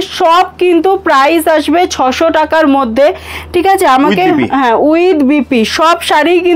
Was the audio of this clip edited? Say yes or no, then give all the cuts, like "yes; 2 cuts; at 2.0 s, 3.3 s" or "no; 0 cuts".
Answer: no; 0 cuts